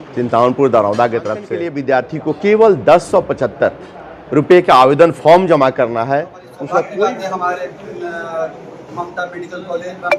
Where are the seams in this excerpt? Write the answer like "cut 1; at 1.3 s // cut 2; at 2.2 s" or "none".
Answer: cut 1; at 1.7 s // cut 2; at 7.1 s